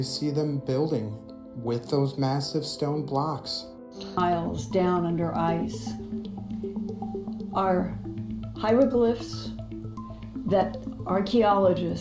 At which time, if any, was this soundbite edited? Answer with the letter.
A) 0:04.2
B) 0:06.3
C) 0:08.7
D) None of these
A